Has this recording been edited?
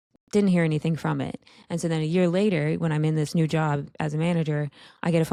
no; 0 cuts

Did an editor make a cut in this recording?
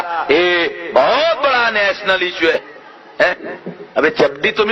yes; 1 cut; at 2.5 s

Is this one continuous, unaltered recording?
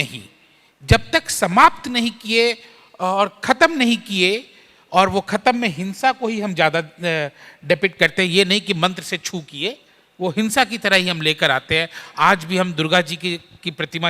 yes; 0 cuts

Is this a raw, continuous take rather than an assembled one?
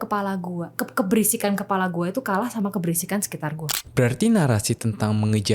no; 1 cut; at 3.8 s

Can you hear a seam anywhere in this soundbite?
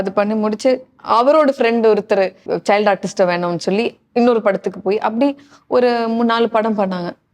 yes; 1 cut; at 2.5 s

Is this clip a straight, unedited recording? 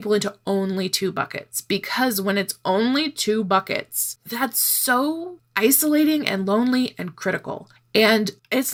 yes; 0 cuts

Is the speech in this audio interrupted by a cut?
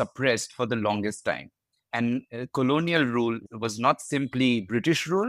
no; 0 cuts

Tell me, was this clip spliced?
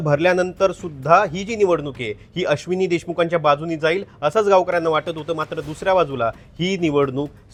no; 0 cuts

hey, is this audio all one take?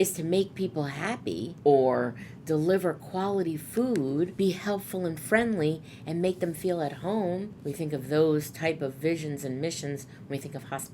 no; 3 cuts; at 1.5 s, 4.3 s, 7.6 s

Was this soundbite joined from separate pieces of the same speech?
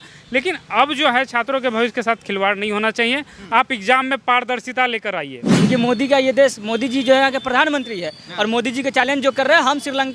yes; 1 cut; at 5.5 s

